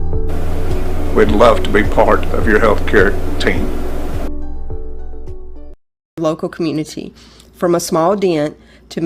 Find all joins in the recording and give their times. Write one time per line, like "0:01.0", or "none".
0:05.9